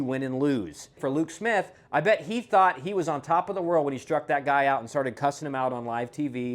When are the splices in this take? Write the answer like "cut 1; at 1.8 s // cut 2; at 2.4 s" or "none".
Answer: cut 1; at 0.9 s